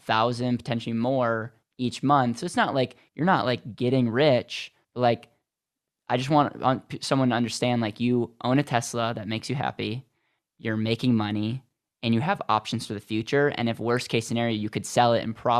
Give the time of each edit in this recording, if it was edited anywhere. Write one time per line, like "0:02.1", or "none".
none